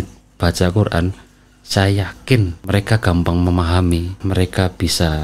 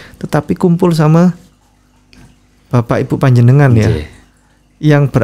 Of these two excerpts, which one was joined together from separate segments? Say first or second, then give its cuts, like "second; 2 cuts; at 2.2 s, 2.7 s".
first; 2 cuts; at 2.6 s, 4.1 s